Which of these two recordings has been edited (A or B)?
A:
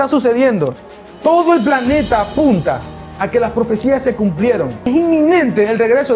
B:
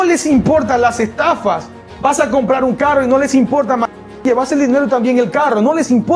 A